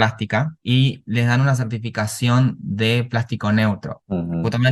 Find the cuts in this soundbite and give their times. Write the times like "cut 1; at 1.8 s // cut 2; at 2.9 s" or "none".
none